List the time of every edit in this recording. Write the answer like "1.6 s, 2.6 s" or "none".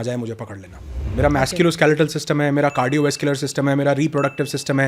1.1 s